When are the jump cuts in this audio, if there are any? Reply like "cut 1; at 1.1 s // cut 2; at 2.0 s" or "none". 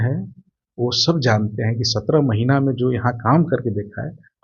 none